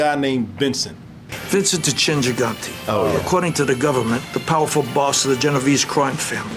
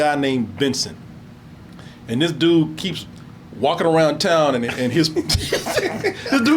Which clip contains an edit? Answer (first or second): first